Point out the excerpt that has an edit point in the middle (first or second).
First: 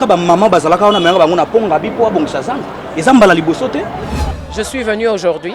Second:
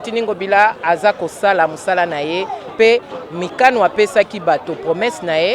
first